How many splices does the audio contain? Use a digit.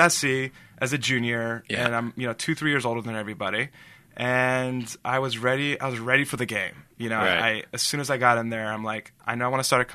0